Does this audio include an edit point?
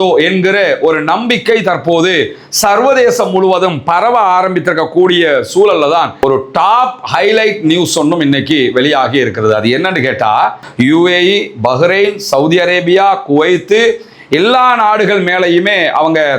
yes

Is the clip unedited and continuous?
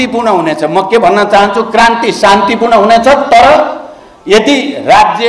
yes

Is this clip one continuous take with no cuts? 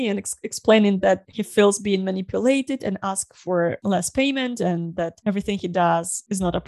yes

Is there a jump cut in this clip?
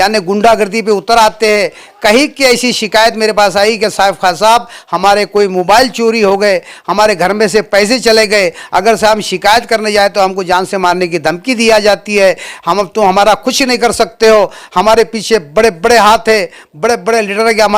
no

